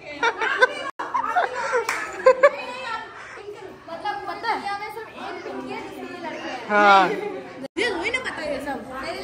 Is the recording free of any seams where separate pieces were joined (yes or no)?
yes